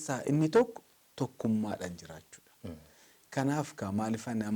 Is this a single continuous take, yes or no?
yes